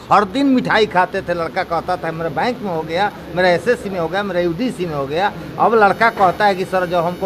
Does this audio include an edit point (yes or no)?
no